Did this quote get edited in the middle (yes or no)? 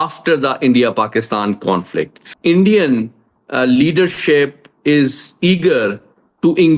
yes